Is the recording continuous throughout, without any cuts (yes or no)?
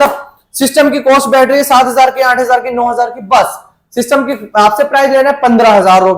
yes